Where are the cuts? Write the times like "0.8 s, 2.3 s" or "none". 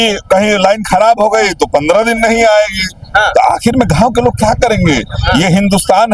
none